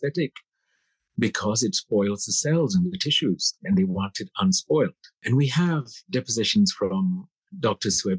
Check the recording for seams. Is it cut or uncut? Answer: cut